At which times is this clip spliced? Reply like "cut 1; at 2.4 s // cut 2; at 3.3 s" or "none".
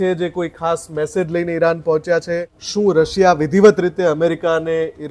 cut 1; at 2.6 s

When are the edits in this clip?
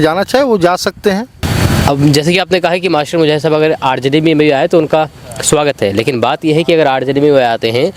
cut 1; at 1.5 s

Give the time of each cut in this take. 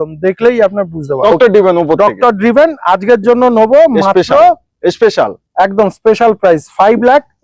cut 1; at 1.3 s

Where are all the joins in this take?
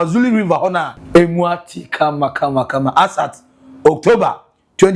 cut 1; at 0.9 s

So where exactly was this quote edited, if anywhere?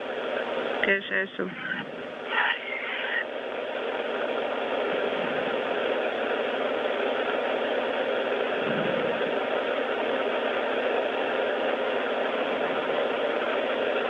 cut 1; at 8.7 s

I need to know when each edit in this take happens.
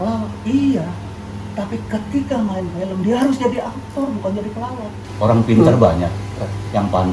cut 1; at 5.0 s

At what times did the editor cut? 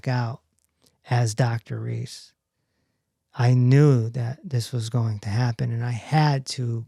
none

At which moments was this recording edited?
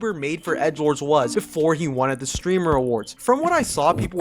cut 1; at 2.8 s

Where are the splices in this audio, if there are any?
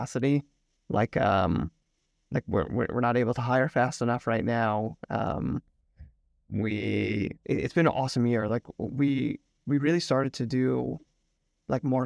cut 1; at 7.4 s

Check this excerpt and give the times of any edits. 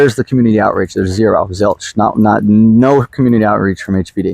none

